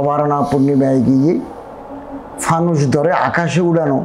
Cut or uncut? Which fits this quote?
uncut